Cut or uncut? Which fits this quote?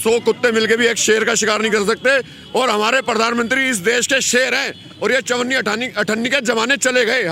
uncut